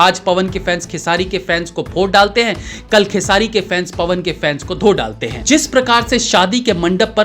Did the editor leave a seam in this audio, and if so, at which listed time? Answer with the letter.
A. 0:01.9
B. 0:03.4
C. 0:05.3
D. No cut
C